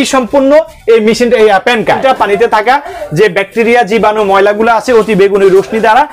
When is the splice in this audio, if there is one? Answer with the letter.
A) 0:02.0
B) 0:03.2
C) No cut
A